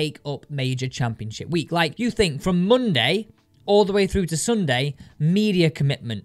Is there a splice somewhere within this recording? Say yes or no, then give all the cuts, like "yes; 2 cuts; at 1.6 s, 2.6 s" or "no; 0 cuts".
no; 0 cuts